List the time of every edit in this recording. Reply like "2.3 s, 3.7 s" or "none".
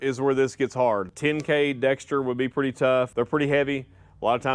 1.1 s, 3.1 s